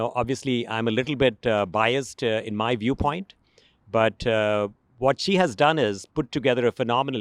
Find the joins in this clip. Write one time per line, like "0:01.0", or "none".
none